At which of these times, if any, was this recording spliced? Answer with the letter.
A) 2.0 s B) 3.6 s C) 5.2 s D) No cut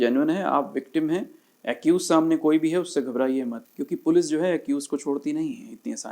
B